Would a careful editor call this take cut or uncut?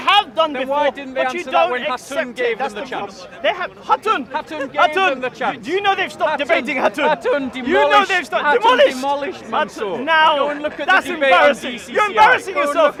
uncut